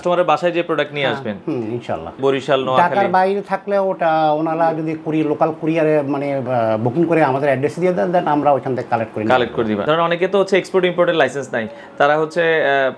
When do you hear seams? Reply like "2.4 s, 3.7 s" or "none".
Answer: 2.2 s, 9.8 s